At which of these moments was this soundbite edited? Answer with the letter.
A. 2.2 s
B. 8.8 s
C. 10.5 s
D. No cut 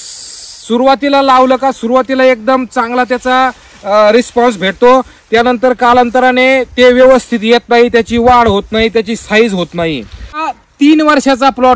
C